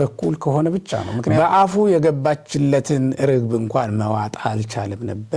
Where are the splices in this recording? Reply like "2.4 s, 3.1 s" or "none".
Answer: 1.3 s